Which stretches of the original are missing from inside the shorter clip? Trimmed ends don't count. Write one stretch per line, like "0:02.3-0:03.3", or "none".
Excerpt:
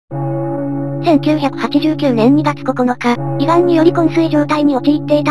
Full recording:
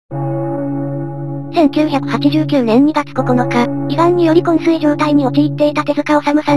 0:01.0-0:01.5